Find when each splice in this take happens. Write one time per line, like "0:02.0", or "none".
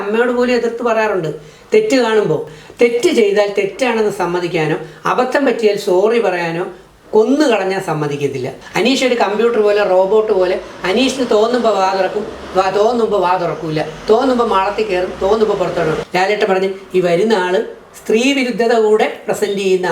0:02.6
0:08.6
0:16.0